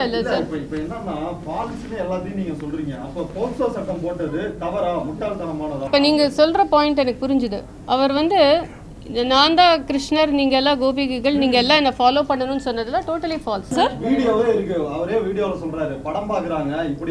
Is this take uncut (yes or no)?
no